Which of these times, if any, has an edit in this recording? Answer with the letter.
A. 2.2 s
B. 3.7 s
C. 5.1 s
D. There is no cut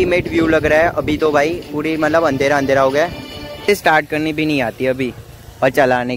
B